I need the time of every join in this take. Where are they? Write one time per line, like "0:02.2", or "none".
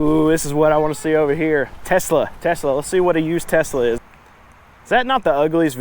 0:04.0